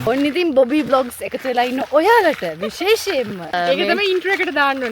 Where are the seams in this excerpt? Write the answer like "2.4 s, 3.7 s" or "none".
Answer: 3.5 s